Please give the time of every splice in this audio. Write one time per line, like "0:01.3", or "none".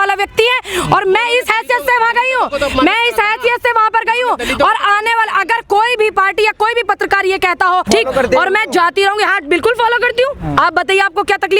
0:07.9